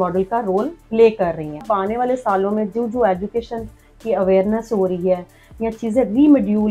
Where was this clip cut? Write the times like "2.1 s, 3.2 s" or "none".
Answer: 1.6 s